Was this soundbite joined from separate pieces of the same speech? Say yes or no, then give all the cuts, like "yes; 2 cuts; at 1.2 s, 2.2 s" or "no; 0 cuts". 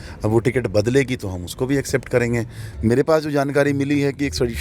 yes; 1 cut; at 2.7 s